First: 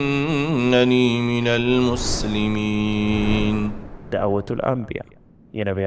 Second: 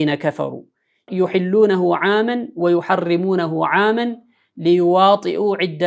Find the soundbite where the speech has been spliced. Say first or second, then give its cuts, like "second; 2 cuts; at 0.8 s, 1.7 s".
second; 1 cut; at 1.1 s